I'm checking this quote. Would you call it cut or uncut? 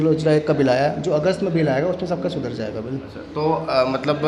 uncut